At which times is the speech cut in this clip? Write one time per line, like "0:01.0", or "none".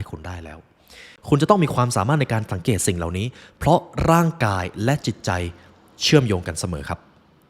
0:01.1